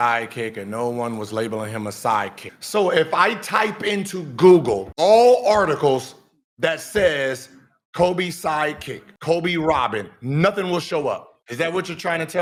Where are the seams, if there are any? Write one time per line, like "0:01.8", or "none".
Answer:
none